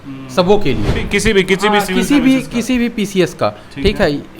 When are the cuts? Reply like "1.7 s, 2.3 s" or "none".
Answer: 1.0 s